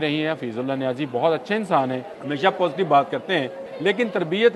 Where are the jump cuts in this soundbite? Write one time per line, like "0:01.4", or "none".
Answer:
0:02.1
0:03.6